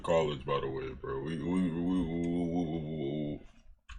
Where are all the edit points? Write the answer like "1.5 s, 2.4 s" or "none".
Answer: none